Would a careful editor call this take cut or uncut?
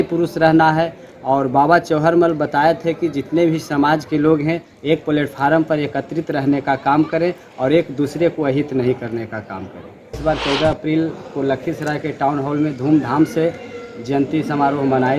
cut